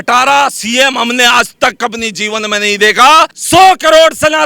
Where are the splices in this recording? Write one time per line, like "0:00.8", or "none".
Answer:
0:03.3